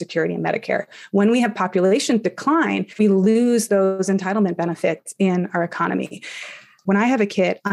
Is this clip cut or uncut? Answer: cut